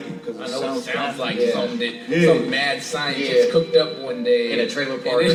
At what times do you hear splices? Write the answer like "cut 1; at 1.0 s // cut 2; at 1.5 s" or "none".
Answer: none